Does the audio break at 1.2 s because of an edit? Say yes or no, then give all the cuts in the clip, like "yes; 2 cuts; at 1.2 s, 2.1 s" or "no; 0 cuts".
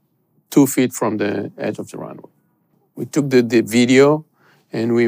no; 1 cut; at 2.8 s